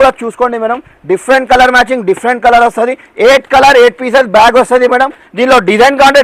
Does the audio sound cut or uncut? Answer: uncut